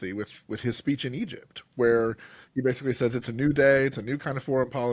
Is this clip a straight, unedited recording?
yes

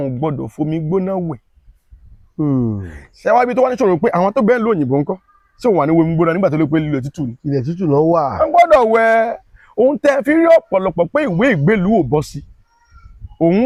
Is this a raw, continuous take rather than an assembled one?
yes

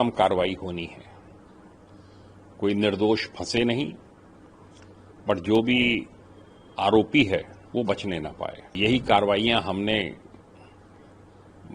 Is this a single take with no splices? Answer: no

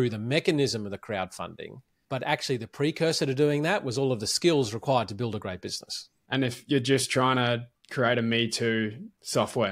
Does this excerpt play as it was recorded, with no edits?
no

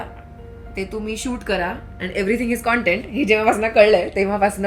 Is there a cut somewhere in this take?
no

